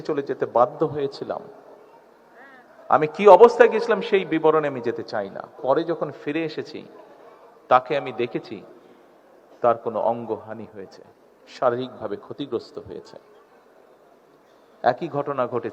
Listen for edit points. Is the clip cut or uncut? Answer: cut